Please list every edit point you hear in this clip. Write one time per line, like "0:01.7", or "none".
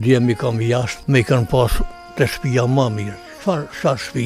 0:00.9